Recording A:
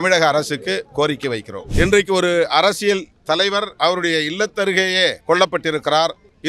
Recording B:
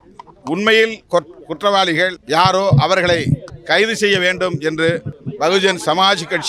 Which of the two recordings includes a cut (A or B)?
A